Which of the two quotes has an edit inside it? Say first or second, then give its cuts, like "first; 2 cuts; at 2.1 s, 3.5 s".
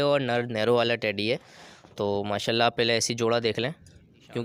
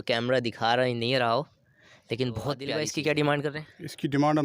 second; 1 cut; at 2.7 s